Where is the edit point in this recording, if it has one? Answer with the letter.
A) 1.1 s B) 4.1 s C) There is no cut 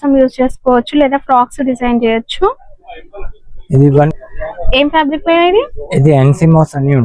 B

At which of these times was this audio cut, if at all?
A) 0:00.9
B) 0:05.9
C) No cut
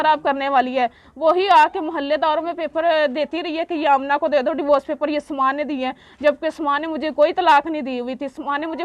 C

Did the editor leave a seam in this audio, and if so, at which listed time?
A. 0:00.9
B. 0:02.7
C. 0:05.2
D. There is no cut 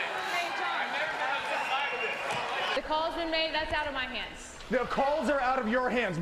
B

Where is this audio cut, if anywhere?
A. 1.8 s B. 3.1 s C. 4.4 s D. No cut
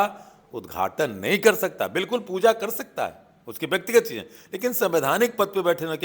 D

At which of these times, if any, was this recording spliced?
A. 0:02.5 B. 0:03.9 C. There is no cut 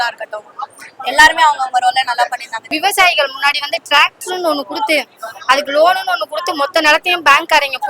A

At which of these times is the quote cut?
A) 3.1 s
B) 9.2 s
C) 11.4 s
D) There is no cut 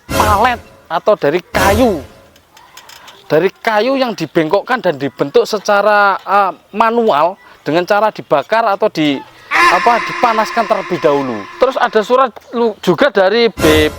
C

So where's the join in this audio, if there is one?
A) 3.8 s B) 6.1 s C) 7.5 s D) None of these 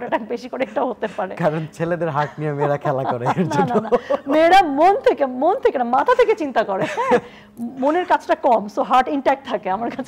D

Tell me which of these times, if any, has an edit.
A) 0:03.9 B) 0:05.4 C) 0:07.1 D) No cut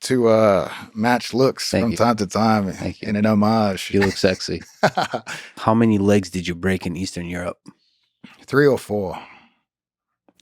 B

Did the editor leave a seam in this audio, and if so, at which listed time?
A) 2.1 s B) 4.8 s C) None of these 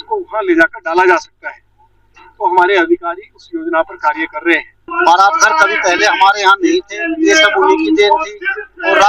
B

